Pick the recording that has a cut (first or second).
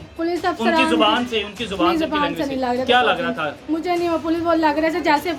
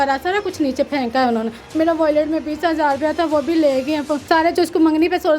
second